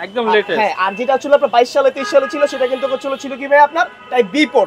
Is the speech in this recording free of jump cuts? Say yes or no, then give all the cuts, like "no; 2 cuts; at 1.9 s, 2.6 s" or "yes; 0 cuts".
yes; 0 cuts